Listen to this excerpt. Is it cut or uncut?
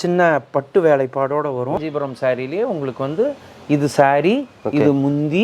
cut